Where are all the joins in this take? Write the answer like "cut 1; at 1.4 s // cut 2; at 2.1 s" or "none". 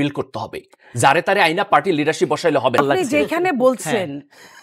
cut 1; at 2.8 s